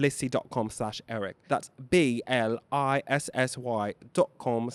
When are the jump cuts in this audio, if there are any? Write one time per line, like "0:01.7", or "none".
none